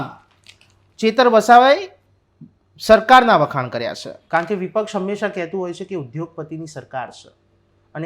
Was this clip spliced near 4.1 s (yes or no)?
yes